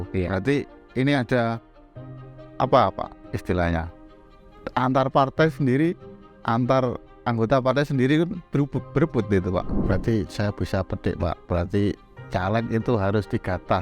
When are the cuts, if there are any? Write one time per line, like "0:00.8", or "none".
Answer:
0:09.8